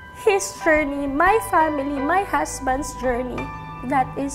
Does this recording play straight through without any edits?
yes; 0 cuts

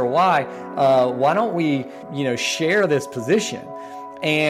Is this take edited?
yes; 1 cut; at 2.0 s

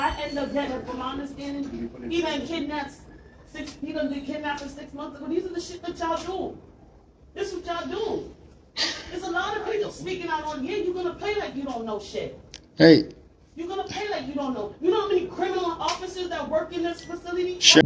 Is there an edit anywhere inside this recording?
no; 0 cuts

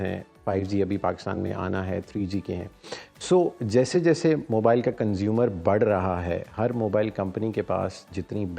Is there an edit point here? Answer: no; 0 cuts

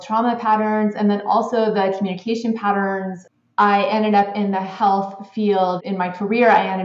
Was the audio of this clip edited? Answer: yes; 2 cuts; at 3.2 s, 5.8 s

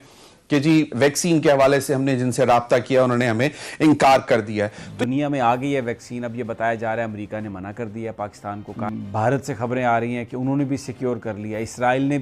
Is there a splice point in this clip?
yes; 2 cuts; at 4.9 s, 8.7 s

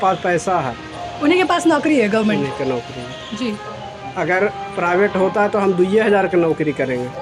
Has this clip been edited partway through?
no; 0 cuts

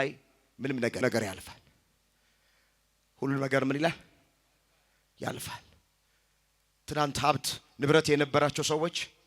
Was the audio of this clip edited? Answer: yes; 1 cut; at 1.0 s

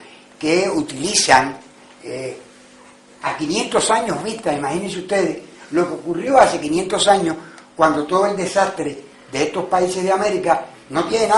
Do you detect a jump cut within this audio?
yes; 1 cut; at 1.4 s

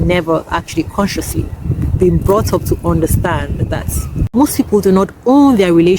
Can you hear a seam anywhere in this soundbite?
yes; 2 cuts; at 1.6 s, 4.3 s

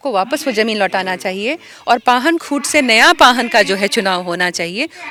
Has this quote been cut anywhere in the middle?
no; 0 cuts

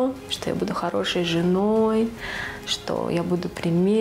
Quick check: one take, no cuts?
yes; 0 cuts

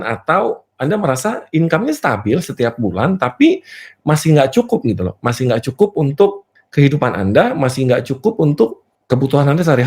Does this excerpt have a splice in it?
yes; 1 cut; at 8.9 s

